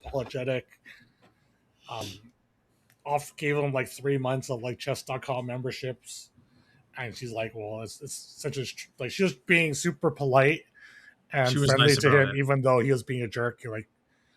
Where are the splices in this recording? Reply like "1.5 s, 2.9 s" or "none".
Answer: 2.0 s